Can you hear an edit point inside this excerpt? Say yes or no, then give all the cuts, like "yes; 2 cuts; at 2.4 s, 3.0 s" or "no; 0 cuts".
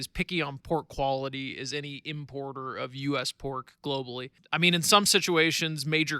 yes; 1 cut; at 4.4 s